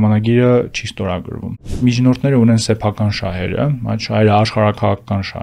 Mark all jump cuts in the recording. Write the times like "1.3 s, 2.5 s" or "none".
1.8 s